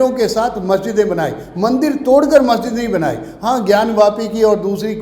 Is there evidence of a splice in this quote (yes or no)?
no